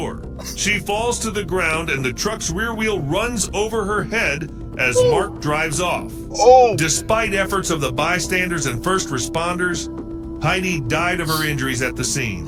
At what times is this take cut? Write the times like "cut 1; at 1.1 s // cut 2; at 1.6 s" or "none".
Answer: none